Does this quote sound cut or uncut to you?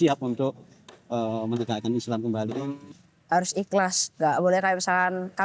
cut